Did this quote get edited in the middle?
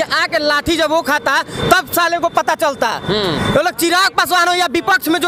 no; 0 cuts

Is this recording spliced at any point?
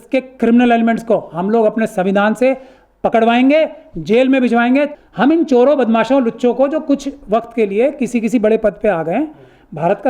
yes; 1 cut; at 4.9 s

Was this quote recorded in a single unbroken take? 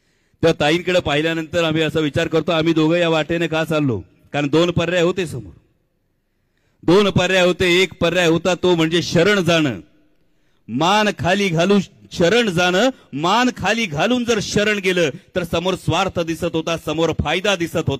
yes; 0 cuts

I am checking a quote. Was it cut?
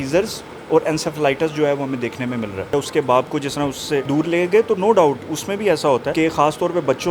yes; 3 cuts; at 2.7 s, 4.1 s, 6.1 s

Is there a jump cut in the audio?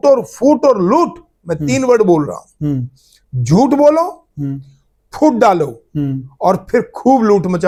no; 0 cuts

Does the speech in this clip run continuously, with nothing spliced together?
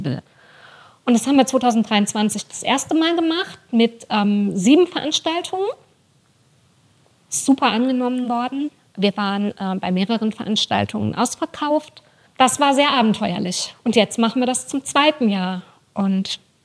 no; 1 cut; at 12.2 s

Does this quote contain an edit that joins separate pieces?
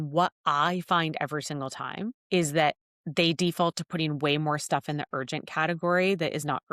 yes; 1 cut; at 2.2 s

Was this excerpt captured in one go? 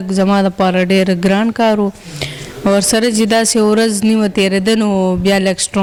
yes; 0 cuts

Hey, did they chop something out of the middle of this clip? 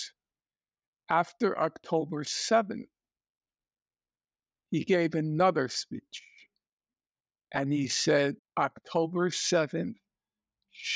yes; 1 cut; at 8.4 s

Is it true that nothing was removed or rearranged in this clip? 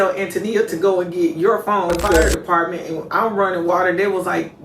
no; 1 cut; at 2.4 s

